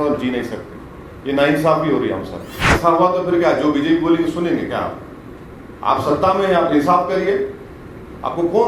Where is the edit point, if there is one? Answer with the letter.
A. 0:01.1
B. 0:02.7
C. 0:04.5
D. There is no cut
B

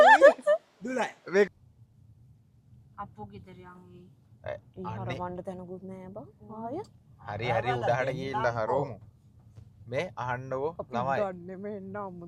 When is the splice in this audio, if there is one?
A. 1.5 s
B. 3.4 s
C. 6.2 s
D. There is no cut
A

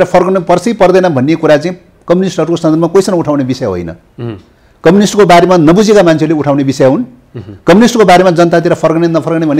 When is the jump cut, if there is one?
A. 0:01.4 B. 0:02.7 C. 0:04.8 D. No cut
D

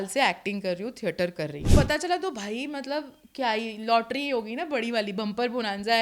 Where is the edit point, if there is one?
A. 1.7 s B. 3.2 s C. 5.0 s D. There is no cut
A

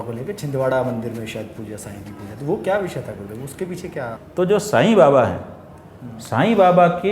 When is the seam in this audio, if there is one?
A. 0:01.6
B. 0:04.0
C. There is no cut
B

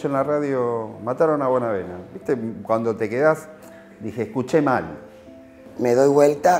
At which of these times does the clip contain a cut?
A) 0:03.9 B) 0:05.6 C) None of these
B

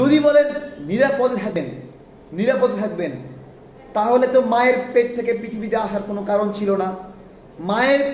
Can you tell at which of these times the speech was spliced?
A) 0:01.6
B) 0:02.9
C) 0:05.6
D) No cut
A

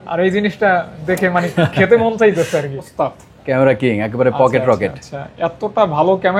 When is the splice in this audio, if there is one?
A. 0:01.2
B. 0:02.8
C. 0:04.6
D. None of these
B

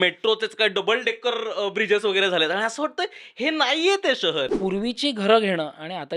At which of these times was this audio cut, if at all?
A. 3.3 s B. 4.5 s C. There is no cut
B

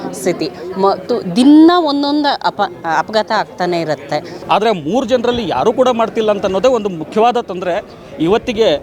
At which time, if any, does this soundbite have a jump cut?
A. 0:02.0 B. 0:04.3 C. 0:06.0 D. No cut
B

